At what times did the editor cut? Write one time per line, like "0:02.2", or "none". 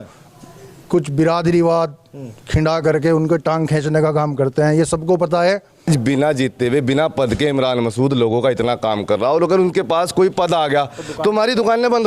0:05.9